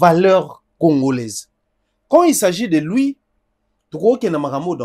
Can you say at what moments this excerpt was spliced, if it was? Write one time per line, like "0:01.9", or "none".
none